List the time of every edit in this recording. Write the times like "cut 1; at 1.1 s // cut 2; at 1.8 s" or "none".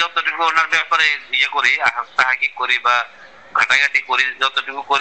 none